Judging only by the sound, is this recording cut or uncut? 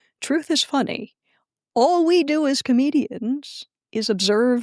uncut